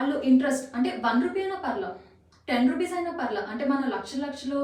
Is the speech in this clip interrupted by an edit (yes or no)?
no